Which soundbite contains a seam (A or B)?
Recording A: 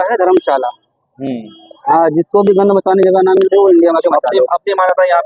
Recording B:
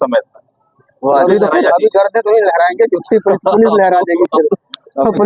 B